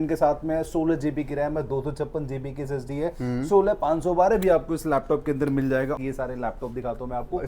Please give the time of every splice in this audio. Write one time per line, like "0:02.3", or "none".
0:06.0